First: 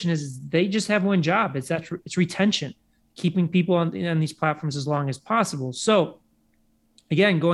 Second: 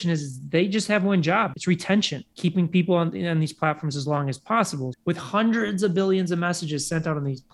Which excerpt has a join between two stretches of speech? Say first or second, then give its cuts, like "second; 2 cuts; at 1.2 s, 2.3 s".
second; 3 cuts; at 1.6 s, 2.2 s, 4.9 s